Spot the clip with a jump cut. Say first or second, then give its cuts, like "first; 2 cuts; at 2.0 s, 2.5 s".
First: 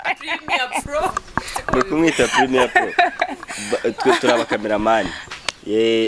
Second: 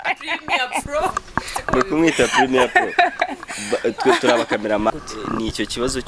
second; 1 cut; at 4.9 s